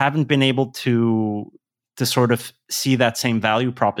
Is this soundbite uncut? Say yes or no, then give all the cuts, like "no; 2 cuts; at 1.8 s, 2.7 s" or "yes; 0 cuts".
yes; 0 cuts